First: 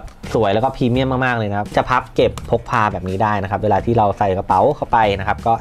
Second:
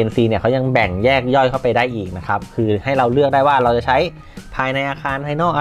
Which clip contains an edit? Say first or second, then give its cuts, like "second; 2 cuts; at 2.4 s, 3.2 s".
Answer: first; 1 cut; at 1.7 s